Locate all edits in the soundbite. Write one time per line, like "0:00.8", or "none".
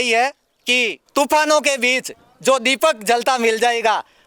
0:01.0